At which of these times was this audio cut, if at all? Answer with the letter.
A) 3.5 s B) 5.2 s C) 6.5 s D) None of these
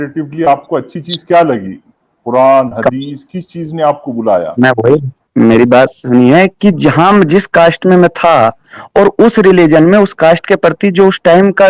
D